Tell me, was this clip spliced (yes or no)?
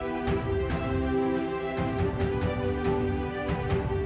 no